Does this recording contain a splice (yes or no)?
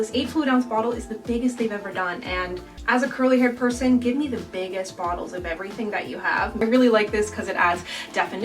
yes